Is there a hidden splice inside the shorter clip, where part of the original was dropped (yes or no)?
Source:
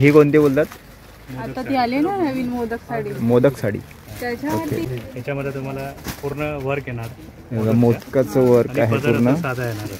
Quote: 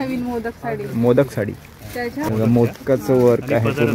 yes